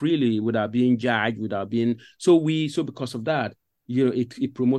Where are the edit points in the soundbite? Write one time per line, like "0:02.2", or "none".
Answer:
none